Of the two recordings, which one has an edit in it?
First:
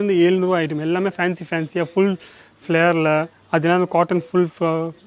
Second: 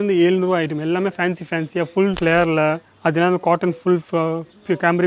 second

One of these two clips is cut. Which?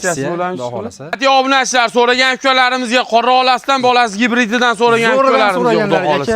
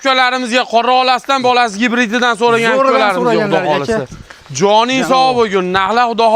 first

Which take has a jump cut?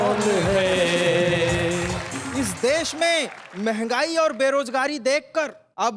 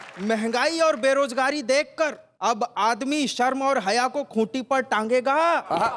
first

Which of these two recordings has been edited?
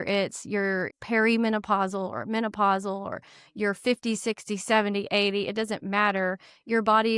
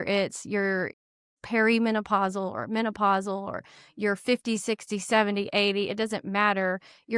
first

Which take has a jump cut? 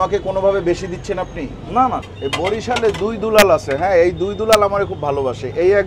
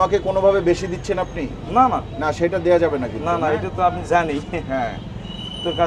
first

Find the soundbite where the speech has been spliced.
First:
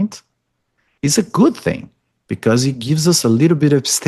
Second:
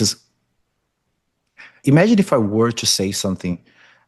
second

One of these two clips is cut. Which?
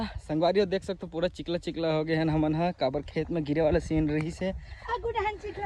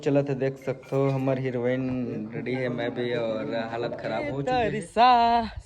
second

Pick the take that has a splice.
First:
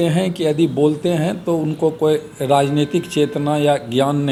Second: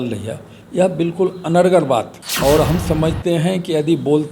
second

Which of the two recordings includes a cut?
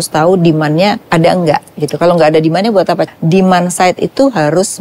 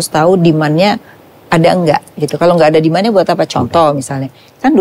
first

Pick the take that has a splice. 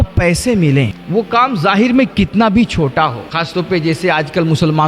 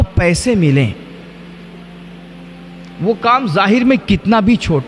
first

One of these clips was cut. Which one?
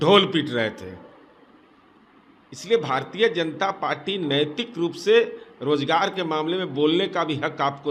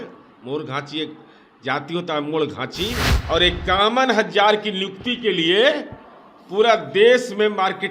second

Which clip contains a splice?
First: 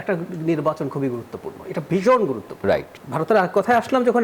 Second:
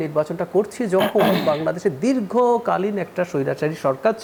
first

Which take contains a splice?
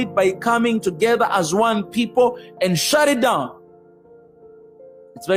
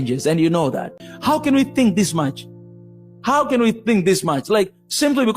second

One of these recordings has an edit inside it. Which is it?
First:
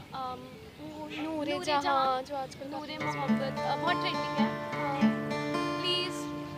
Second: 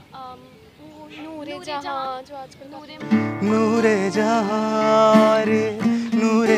second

